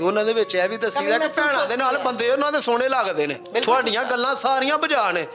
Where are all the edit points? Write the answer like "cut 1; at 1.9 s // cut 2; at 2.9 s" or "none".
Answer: cut 1; at 3.4 s